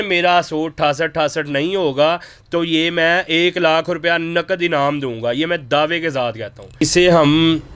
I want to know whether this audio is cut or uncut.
cut